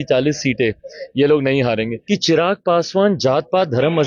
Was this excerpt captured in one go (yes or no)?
no